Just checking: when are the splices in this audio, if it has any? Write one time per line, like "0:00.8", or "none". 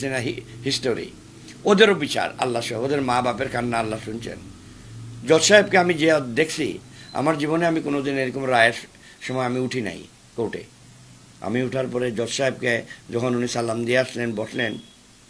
none